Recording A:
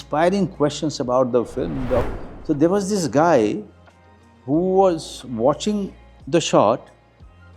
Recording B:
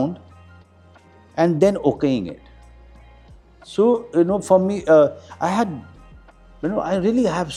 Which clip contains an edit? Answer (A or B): A